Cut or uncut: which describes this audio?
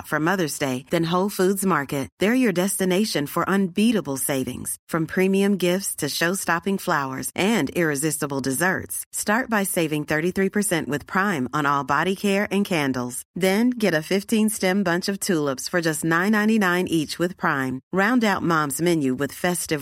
uncut